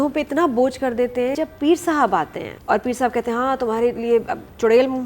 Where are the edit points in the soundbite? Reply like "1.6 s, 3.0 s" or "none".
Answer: 1.4 s, 2.5 s